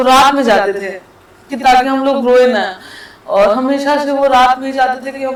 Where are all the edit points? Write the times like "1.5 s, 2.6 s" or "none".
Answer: none